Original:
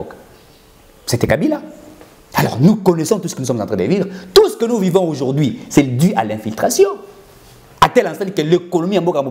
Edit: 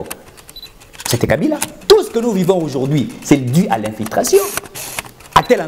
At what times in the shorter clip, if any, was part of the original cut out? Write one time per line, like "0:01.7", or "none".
0:01.7

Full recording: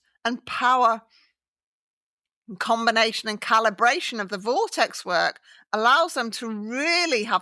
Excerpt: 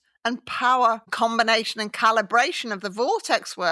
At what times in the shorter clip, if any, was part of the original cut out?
0:01.1

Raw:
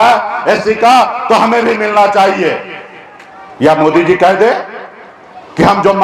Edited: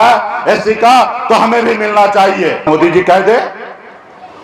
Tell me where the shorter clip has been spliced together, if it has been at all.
0:02.6

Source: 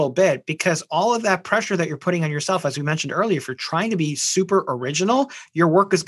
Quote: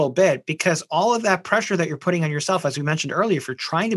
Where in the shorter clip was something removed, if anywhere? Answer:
none

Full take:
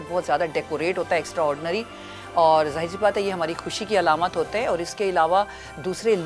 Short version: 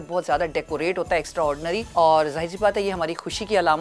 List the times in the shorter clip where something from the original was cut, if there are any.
0:01.9

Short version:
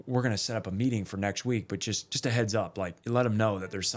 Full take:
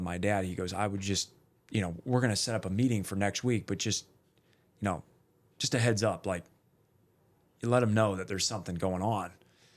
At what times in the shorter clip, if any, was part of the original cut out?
0:02.1
0:03.0

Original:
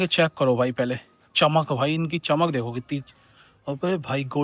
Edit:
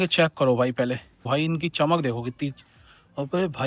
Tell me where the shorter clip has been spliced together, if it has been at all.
0:01.2

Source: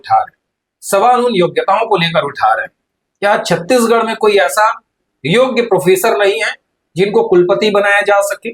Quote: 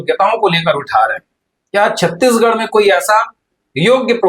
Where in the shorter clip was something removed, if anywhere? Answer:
none

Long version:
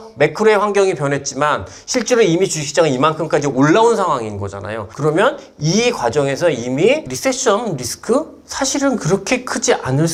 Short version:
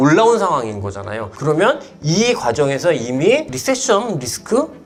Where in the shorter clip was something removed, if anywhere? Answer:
none

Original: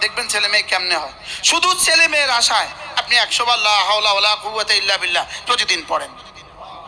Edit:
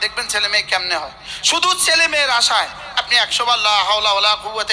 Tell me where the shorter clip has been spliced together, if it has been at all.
none

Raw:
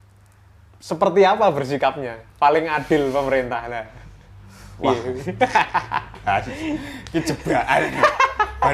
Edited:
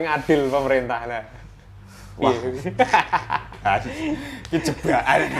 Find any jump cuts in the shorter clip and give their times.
none

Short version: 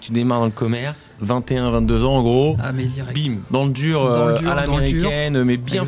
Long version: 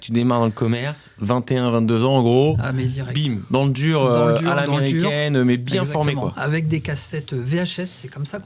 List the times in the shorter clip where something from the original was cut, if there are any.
none

